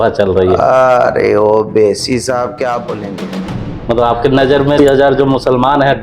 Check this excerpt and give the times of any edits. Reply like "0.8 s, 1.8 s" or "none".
4.8 s